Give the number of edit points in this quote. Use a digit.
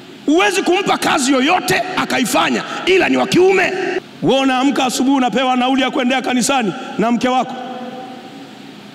1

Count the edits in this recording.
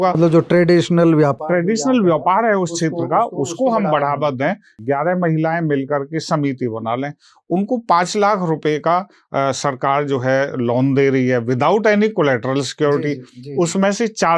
1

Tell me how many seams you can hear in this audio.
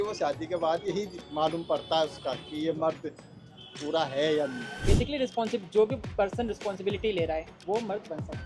2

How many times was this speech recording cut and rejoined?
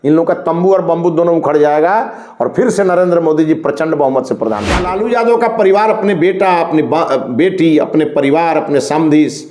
1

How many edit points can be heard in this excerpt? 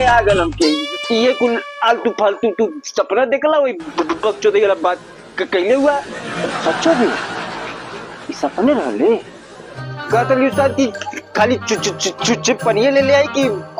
1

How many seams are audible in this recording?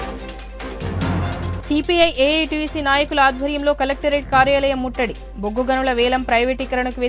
1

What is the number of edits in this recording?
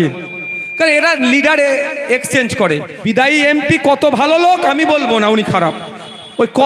1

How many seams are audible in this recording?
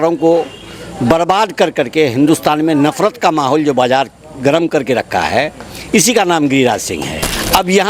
0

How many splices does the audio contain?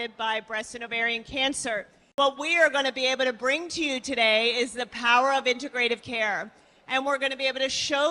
1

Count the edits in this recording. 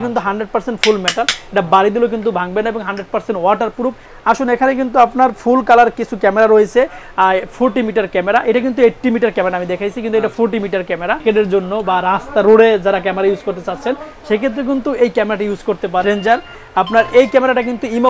3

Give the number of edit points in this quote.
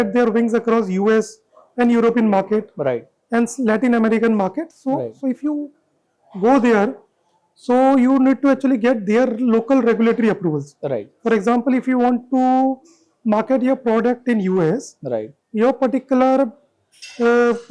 0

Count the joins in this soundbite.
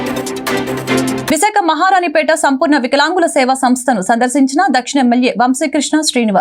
1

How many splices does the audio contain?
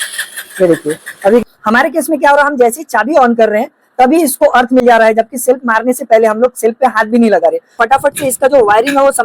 2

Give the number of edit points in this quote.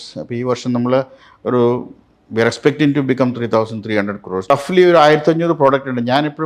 1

